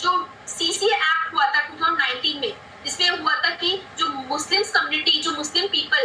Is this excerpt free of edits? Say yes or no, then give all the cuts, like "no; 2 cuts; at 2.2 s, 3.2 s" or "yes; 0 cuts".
yes; 0 cuts